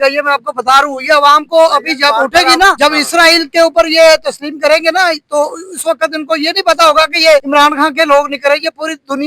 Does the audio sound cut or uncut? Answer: cut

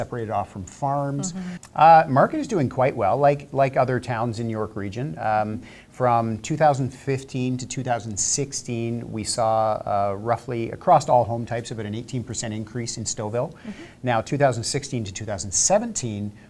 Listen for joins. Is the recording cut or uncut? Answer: cut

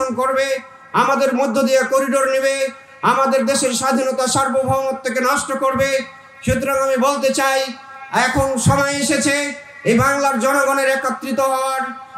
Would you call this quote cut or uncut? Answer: uncut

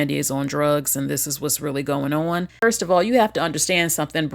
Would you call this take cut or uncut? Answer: cut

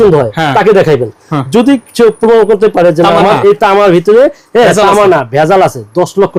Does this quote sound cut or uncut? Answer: uncut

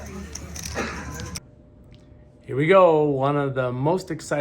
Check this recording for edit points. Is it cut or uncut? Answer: cut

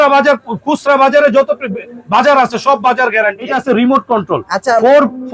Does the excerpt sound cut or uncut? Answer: cut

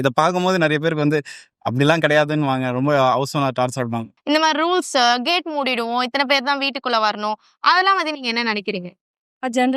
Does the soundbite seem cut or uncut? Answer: cut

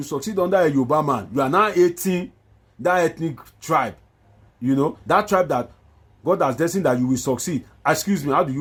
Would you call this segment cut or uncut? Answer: uncut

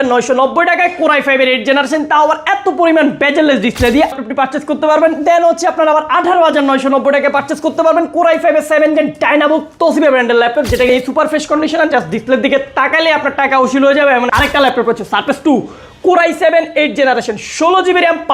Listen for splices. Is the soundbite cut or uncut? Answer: cut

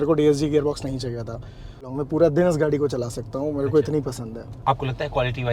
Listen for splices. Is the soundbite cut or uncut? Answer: cut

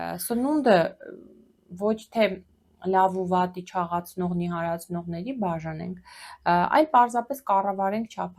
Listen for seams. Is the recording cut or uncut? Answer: uncut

